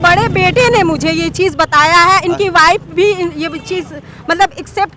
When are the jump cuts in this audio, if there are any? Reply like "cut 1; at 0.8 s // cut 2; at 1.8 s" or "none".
none